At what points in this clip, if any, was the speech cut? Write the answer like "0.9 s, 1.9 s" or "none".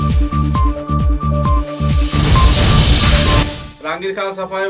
3.6 s

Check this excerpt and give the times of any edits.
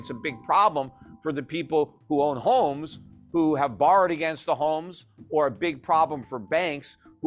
none

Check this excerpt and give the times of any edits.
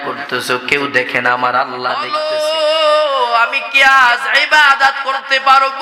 2.1 s

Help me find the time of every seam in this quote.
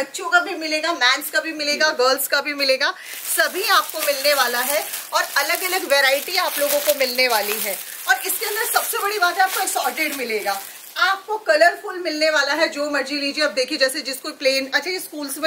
none

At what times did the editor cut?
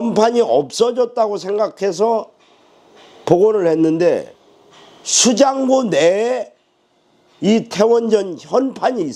none

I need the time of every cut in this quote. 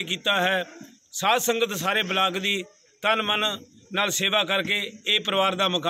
none

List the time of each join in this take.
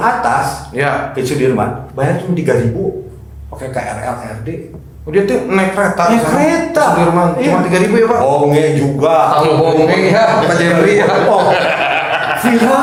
none

